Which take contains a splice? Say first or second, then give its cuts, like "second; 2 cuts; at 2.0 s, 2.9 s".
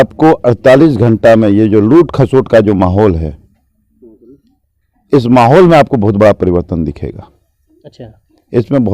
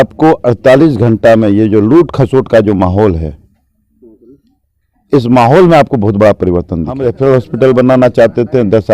second; 1 cut; at 7.0 s